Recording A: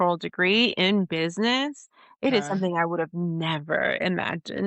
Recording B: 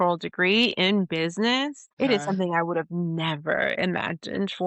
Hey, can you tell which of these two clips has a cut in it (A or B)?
B